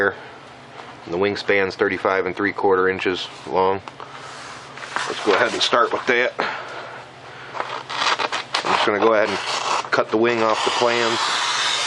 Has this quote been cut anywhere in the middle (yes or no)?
yes